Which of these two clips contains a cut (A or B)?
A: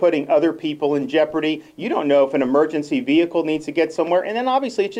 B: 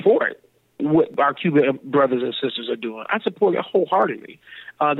B